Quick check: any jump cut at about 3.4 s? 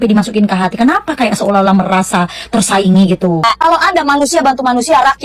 yes; 1 cut; at 3.4 s

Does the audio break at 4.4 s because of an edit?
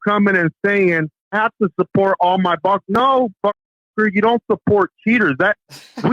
no; 1 cut; at 1.3 s

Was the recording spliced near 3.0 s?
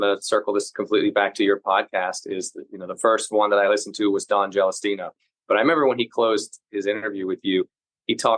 no; 1 cut; at 5.3 s

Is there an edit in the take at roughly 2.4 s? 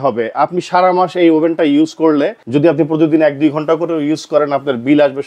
yes; 1 cut; at 2.4 s

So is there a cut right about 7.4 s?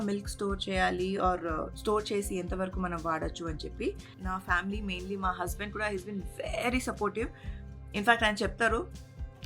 no; 1 cut; at 4.1 s

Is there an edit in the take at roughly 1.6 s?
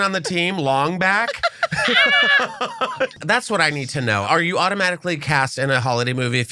no; 2 cuts; at 3.2 s, 4.2 s

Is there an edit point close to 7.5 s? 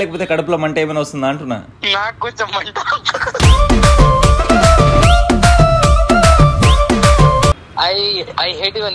yes; 1 cut; at 7.5 s

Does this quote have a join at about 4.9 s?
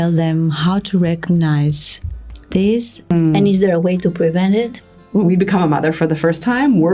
yes; 2 cuts; at 3.1 s, 4.9 s

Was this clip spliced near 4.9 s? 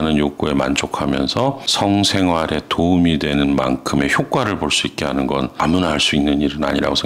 no; 0 cuts

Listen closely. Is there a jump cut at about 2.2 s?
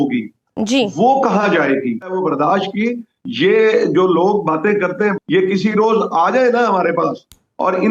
yes; 1 cut; at 2.2 s

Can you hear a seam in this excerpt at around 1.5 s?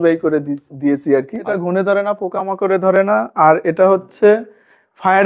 yes; 1 cut; at 1.5 s

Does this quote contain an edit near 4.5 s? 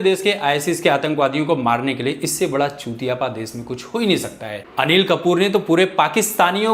yes; 1 cut; at 4.5 s

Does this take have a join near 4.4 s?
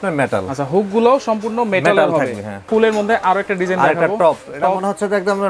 no; 1 cut; at 2.6 s

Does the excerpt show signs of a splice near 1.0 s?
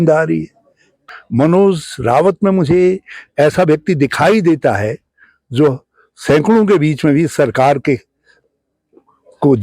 yes; 1 cut; at 1.0 s

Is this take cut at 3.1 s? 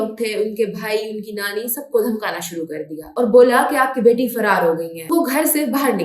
no; 1 cut; at 5.0 s

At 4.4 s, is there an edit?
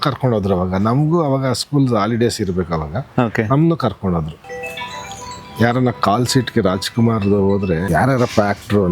yes; 1 cut; at 4.4 s

